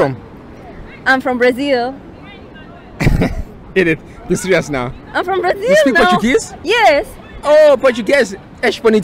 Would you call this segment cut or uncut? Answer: uncut